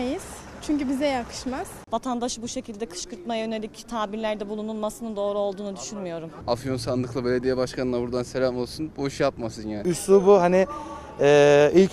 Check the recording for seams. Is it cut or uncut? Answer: cut